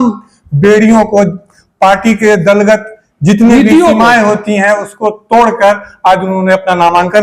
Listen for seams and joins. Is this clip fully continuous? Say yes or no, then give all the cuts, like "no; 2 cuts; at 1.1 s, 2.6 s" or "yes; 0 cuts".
yes; 0 cuts